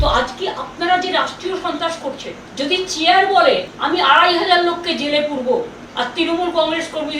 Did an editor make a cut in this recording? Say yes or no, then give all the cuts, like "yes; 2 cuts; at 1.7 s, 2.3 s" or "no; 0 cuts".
yes; 3 cuts; at 2.4 s, 3.7 s, 5.8 s